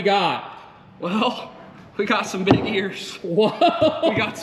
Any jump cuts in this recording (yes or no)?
no